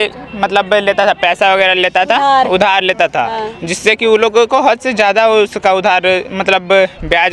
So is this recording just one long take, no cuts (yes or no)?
yes